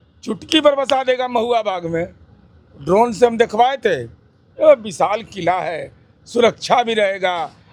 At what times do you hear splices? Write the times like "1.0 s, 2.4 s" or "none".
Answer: none